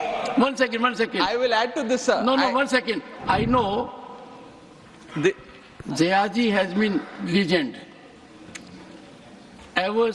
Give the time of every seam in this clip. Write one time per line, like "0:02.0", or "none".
0:03.1

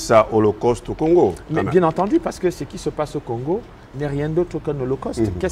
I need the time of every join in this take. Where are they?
none

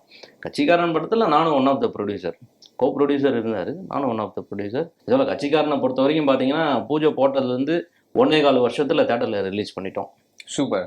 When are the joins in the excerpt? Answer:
0:04.9

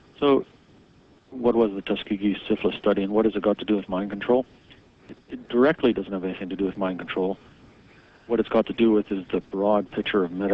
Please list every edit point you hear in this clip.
none

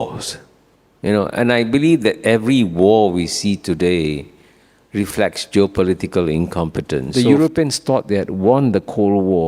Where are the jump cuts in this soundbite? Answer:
0:07.1

